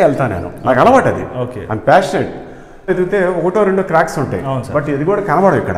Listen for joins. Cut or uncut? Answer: cut